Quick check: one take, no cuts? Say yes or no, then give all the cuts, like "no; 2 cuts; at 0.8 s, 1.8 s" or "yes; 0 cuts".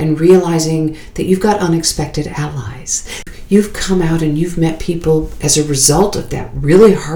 no; 1 cut; at 3.2 s